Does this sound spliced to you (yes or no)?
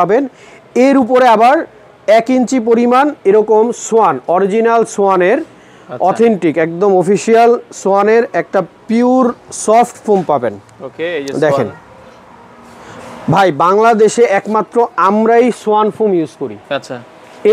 no